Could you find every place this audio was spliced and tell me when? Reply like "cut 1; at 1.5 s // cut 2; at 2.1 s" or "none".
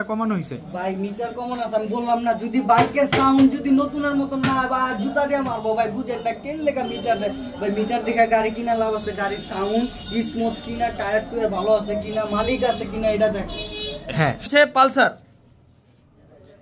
none

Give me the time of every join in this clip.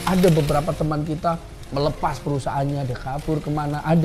none

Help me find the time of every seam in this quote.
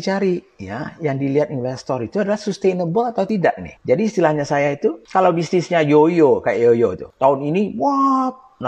cut 1; at 3.3 s // cut 2; at 5.0 s // cut 3; at 7.0 s

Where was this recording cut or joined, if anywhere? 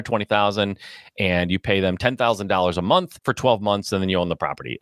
cut 1; at 3.2 s

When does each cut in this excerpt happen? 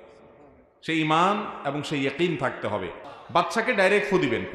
cut 1; at 3.5 s

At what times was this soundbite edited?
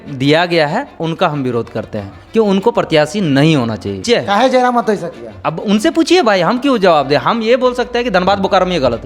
cut 1; at 4.0 s

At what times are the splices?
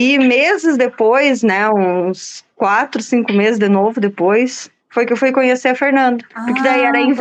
none

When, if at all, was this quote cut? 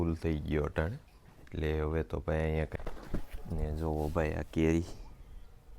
cut 1; at 2.7 s

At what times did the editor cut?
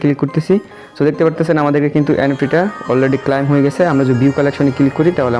none

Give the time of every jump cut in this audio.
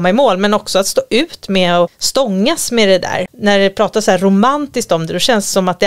cut 1; at 2.0 s // cut 2; at 3.2 s

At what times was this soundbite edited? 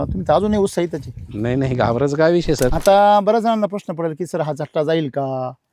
cut 1; at 2.7 s

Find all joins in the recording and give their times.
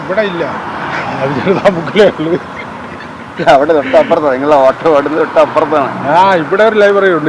none

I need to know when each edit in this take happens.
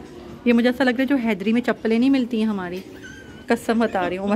none

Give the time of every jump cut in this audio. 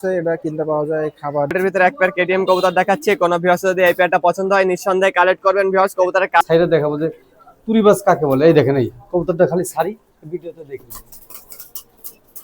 cut 1; at 1.5 s // cut 2; at 6.4 s

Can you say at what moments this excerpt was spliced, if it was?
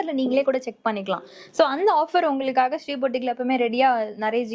none

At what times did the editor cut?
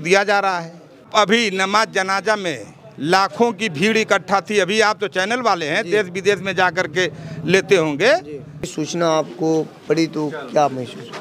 cut 1; at 1.1 s // cut 2; at 8.8 s

